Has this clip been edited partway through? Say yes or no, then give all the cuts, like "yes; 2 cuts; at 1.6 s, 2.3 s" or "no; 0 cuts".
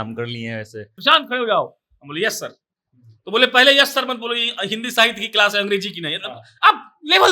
yes; 1 cut; at 0.9 s